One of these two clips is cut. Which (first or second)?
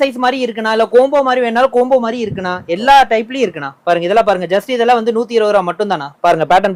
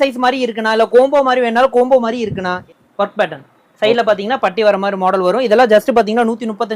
second